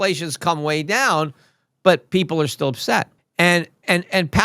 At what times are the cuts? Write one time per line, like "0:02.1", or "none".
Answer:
0:03.2